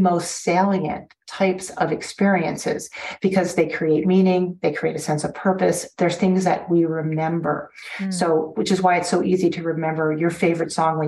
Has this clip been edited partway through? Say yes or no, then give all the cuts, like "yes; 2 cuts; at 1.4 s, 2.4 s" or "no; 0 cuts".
no; 0 cuts